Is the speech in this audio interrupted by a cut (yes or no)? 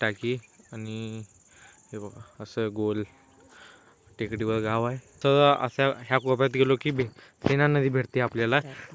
yes